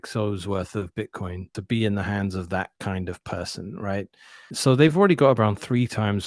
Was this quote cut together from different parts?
yes; 2 cuts; at 1.6 s, 4.5 s

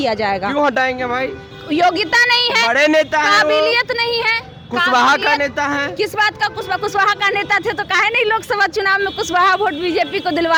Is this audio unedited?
yes; 0 cuts

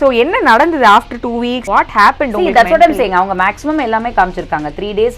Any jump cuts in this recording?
yes; 1 cut; at 1.6 s

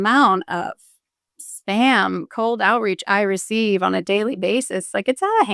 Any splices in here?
no; 0 cuts

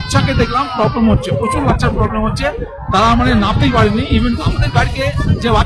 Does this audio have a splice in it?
no; 0 cuts

